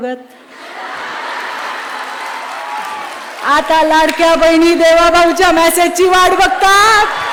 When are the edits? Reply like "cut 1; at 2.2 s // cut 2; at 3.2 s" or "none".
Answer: none